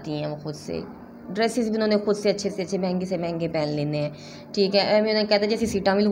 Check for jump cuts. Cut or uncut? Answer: uncut